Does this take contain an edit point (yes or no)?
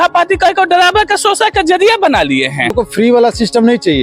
yes